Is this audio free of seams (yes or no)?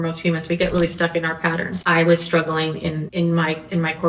no